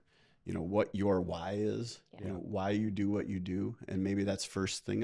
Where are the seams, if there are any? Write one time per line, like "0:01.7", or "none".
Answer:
none